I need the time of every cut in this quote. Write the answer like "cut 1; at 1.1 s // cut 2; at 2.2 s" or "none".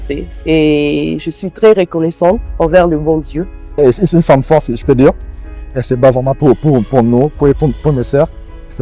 cut 1; at 3.8 s